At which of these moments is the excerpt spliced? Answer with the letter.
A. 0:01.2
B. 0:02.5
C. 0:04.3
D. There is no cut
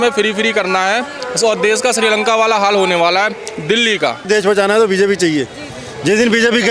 C